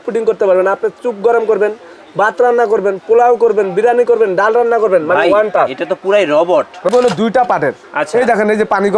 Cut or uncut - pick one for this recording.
cut